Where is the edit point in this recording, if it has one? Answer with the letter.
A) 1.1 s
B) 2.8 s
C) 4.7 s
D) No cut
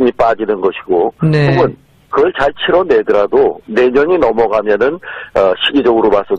C